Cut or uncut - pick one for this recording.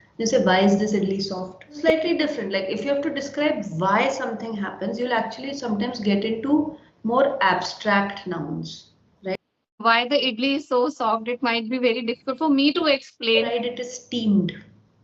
cut